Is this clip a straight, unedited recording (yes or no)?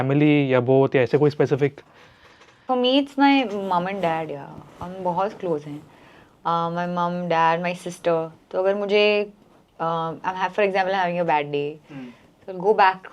yes